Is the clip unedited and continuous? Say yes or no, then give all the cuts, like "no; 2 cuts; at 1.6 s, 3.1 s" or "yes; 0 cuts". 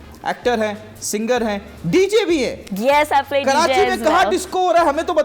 yes; 0 cuts